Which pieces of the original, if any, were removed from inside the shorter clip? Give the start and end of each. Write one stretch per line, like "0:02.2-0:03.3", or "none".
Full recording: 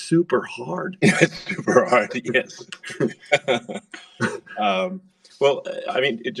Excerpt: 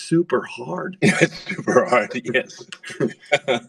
none